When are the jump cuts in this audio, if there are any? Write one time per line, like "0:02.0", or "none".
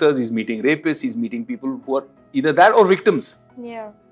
none